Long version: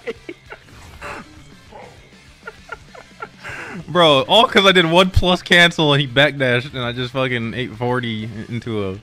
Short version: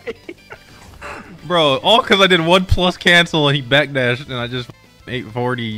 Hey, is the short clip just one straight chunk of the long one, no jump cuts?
no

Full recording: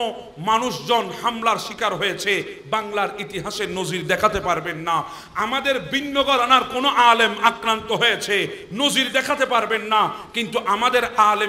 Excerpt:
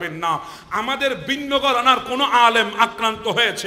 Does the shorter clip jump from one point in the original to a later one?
no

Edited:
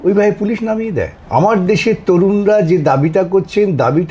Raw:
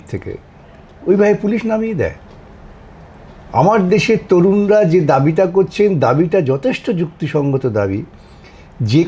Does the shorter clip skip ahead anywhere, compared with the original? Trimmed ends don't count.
yes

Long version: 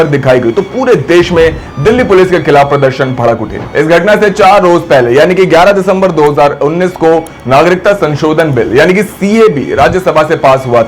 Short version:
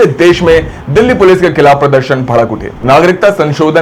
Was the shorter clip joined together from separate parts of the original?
yes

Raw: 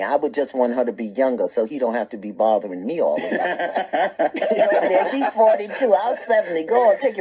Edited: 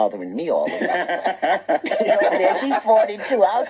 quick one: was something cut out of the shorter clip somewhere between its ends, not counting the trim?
no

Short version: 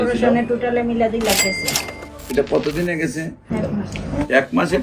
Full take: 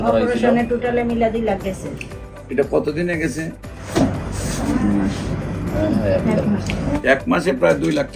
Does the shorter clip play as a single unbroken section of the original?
no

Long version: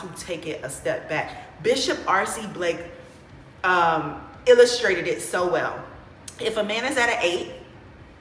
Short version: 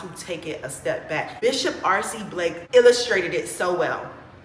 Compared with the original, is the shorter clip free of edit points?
no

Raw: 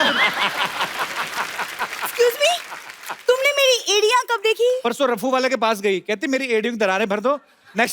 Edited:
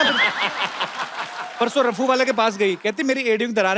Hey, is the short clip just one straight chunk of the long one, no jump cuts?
no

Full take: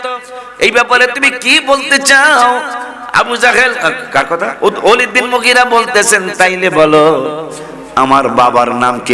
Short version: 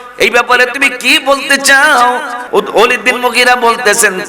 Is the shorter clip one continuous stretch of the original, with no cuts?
no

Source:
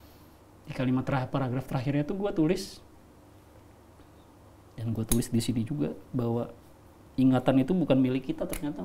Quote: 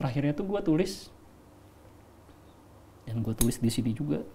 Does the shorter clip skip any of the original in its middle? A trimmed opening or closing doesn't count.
no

